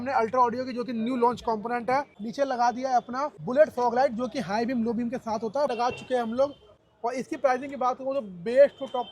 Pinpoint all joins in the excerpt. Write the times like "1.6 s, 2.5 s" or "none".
2.2 s, 3.3 s, 5.7 s, 6.7 s